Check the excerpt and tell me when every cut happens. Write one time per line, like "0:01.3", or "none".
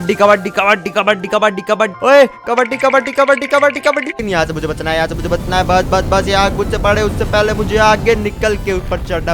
0:01.9
0:04.2

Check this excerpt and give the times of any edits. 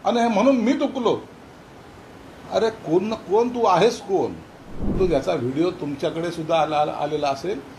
0:04.9

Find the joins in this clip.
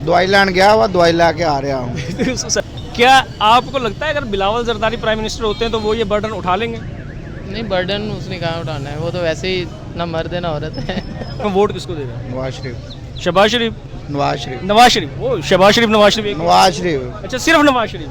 0:02.6
0:11.4

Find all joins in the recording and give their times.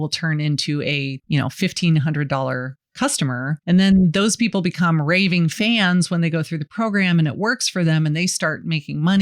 0:01.2
0:03.6

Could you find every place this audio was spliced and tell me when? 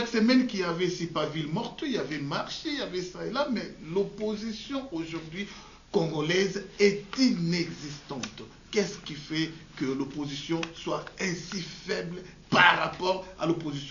none

